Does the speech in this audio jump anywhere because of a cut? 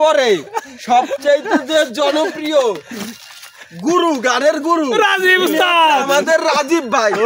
no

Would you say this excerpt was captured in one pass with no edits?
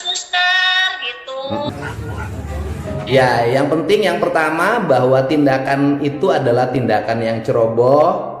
no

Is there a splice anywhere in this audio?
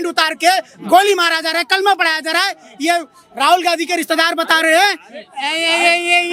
no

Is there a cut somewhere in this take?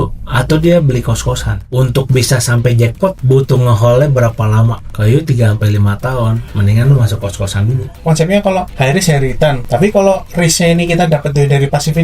yes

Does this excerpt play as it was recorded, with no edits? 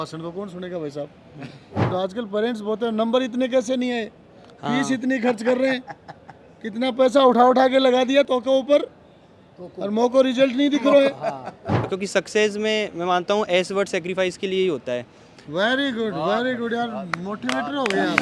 no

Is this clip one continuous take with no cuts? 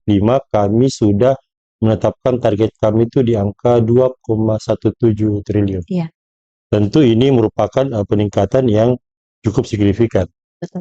yes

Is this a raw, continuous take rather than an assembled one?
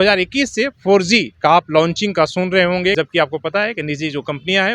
no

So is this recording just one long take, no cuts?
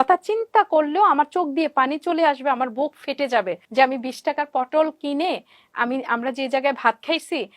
no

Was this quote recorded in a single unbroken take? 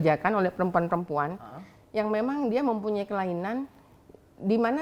yes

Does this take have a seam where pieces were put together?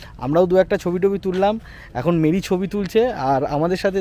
no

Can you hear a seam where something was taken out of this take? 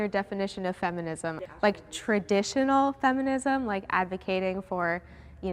yes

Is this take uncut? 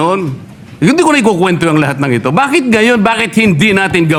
yes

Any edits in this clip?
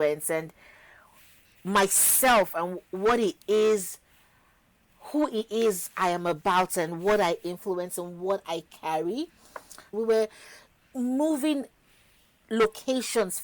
yes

